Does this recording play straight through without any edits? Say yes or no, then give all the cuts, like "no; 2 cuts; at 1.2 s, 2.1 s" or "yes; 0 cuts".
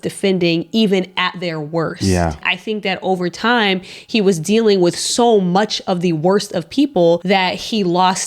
no; 2 cuts; at 2.5 s, 7.2 s